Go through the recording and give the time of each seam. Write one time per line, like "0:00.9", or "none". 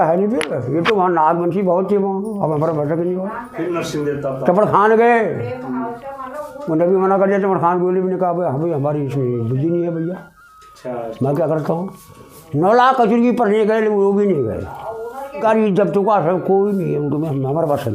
0:15.4